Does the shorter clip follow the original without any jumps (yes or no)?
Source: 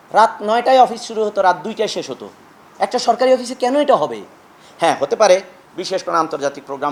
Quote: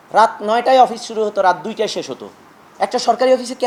yes